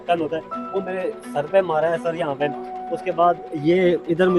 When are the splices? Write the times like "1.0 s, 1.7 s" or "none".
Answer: none